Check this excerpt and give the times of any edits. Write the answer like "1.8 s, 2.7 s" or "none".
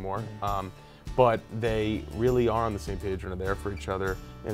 none

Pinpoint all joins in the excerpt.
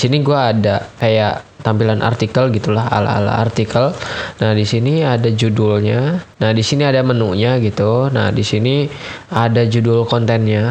0.9 s, 6.3 s

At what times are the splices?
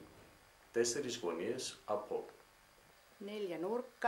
none

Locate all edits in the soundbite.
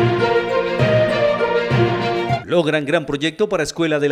2.3 s

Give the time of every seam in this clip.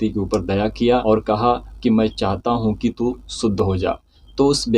none

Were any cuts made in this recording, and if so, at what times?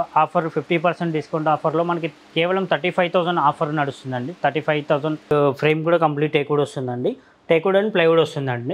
5.3 s

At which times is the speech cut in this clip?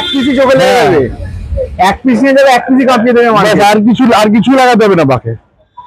none

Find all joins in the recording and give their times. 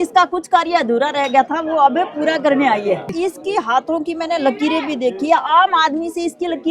3.0 s

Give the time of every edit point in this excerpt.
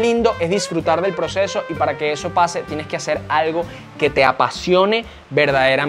none

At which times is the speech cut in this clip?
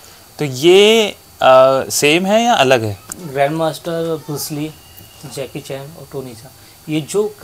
3.1 s

